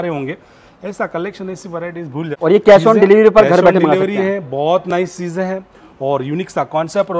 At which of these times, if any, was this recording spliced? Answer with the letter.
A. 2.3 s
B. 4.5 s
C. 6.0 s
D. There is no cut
A